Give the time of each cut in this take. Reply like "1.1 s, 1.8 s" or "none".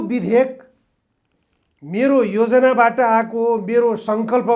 none